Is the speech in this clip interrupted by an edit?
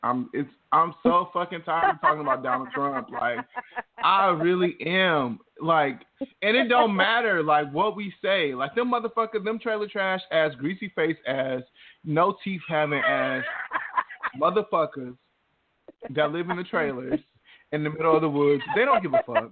no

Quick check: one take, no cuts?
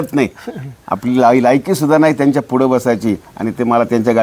yes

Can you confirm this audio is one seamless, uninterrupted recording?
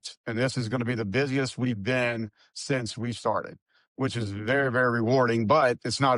yes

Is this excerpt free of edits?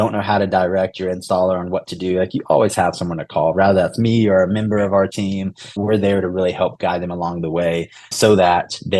no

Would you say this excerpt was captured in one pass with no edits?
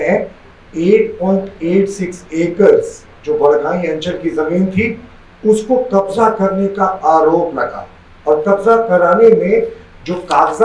yes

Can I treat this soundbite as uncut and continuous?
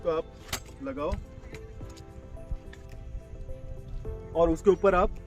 yes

